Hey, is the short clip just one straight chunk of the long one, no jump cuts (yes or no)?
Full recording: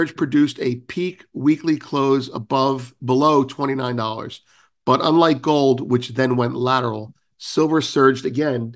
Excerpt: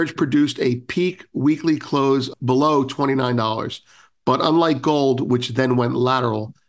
no